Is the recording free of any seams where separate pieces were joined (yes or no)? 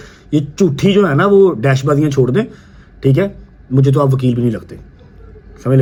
yes